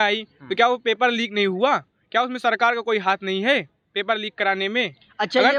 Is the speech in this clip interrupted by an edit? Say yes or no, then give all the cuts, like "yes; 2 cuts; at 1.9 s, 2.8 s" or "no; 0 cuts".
no; 0 cuts